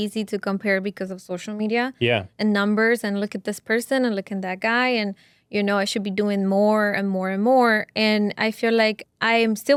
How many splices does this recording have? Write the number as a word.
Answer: zero